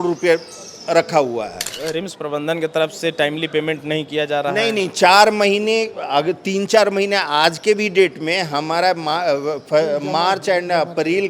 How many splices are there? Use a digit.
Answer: 1